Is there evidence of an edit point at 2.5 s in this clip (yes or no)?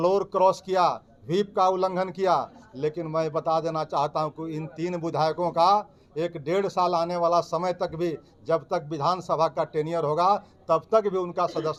no